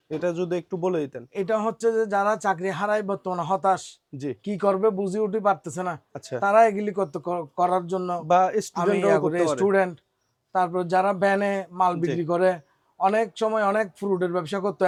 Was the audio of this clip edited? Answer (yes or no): no